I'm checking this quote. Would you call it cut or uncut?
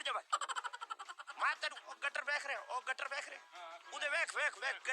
uncut